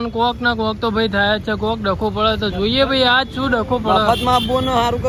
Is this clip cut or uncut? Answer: uncut